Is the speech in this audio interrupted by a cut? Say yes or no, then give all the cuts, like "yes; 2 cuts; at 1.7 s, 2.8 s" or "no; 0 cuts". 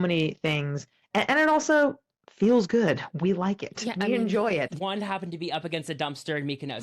yes; 1 cut; at 4.7 s